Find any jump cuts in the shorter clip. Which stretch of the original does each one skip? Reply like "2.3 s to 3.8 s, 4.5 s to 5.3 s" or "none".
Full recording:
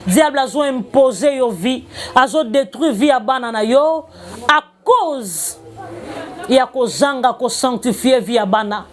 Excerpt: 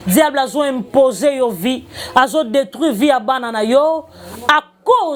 none